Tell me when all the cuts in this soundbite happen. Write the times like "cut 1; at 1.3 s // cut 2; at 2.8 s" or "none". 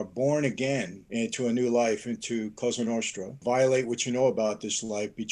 cut 1; at 1.0 s // cut 2; at 3.4 s